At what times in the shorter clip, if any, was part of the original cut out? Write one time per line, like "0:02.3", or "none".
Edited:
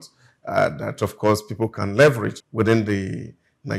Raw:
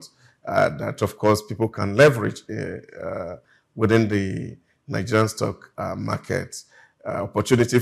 0:02.4